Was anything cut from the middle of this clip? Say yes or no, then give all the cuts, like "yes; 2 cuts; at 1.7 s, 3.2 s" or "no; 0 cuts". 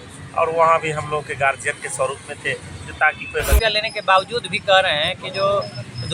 yes; 1 cut; at 3.5 s